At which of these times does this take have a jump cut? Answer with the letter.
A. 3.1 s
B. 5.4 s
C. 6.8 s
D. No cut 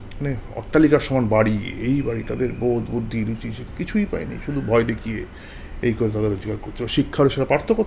D